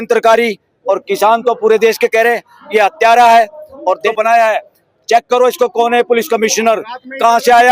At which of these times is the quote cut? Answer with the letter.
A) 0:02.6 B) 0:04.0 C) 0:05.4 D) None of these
B